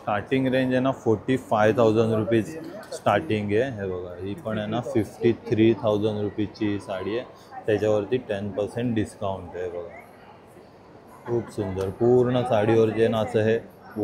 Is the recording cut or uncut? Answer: uncut